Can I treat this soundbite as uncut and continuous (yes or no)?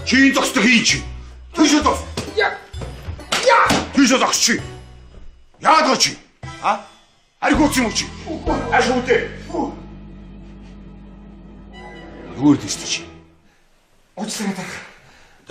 yes